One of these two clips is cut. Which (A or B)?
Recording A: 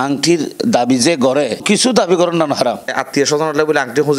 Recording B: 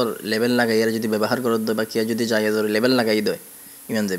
A